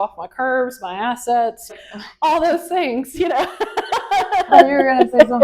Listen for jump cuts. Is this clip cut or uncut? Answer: cut